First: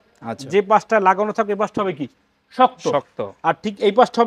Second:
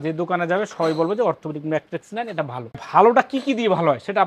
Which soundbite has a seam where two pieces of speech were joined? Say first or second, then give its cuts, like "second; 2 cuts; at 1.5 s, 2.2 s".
second; 1 cut; at 2.8 s